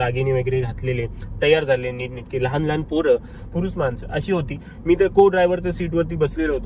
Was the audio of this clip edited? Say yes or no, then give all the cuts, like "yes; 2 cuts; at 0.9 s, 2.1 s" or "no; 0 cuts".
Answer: no; 0 cuts